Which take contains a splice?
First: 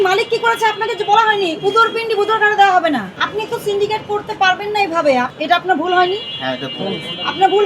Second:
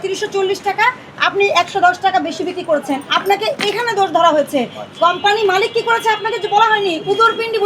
first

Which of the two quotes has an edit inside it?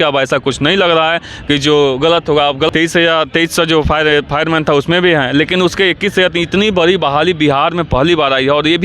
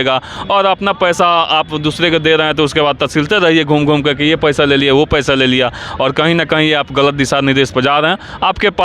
first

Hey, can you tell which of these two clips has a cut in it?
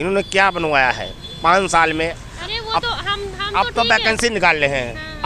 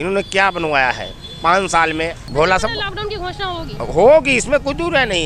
second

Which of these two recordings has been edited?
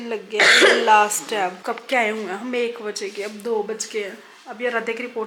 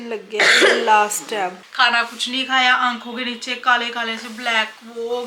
second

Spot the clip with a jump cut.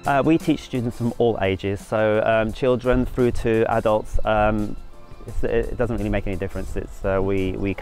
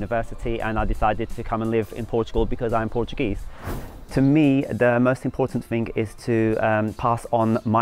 second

